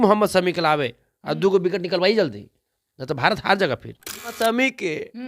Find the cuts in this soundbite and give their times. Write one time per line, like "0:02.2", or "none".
0:04.4

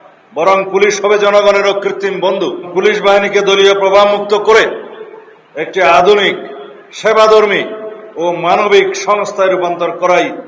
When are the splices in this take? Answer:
0:02.7

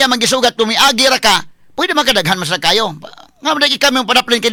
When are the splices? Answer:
none

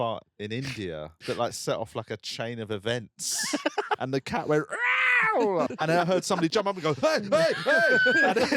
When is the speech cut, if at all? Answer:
0:01.1
0:04.0
0:05.7

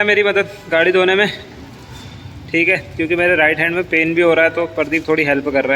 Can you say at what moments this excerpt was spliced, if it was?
none

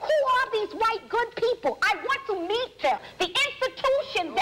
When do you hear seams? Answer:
0:03.1

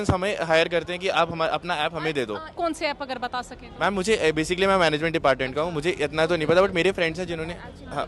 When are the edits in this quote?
0:02.5

